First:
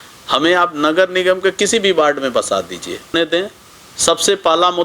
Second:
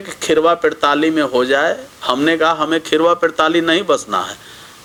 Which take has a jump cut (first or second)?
first